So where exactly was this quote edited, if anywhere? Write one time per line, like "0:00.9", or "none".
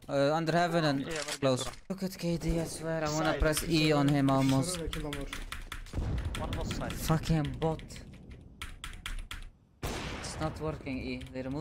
0:01.8